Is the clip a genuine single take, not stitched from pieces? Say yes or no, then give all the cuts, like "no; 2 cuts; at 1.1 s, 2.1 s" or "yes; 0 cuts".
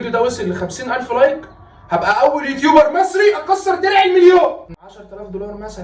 no; 1 cut; at 4.7 s